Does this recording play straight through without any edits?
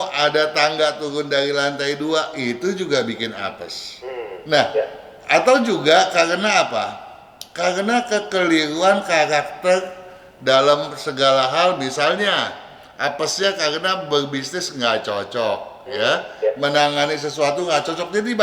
yes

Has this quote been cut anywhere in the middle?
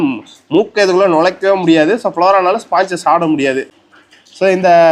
yes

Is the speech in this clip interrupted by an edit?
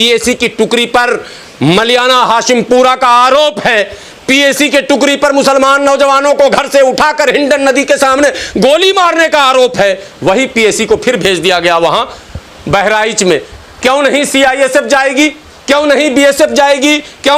no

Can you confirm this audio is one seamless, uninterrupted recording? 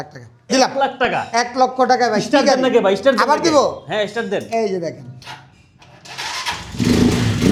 yes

